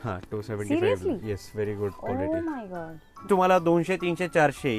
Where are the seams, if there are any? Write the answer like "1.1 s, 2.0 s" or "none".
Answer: 3.3 s